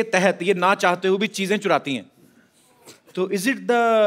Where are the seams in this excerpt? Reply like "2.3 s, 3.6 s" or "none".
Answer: none

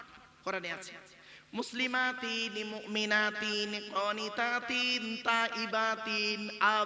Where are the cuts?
none

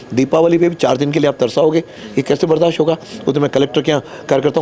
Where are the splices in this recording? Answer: none

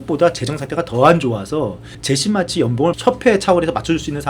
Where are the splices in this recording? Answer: 1.9 s, 3.0 s

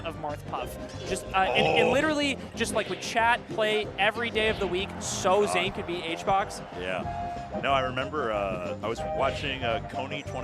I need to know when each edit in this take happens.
none

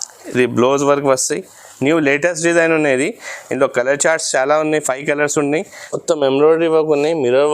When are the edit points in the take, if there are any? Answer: 5.8 s

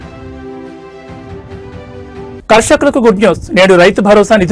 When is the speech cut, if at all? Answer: 2.4 s

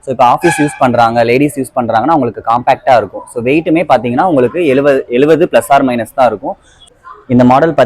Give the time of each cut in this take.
6.7 s

